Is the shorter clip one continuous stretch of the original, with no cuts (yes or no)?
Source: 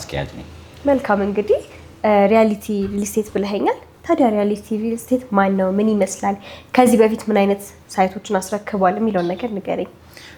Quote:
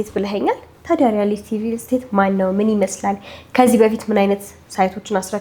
yes